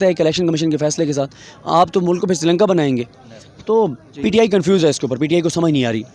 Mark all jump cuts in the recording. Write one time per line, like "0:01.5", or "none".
0:04.1